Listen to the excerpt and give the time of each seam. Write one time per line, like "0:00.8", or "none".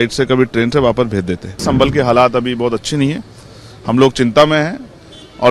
0:01.6